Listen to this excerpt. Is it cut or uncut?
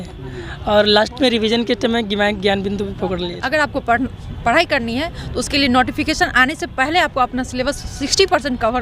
cut